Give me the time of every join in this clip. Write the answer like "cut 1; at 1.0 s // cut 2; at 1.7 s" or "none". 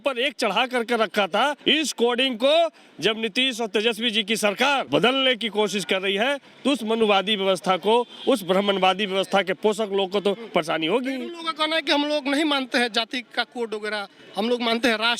cut 1; at 1.6 s // cut 2; at 4.9 s